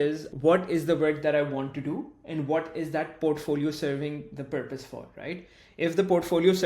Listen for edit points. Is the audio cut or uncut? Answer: uncut